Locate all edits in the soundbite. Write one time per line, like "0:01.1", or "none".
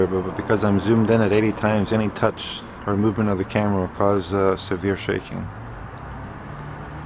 0:01.1